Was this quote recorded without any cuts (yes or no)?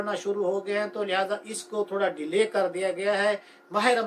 yes